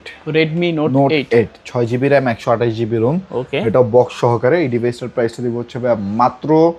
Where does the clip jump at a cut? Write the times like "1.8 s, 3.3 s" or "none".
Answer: none